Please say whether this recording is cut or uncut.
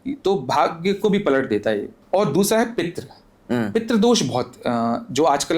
cut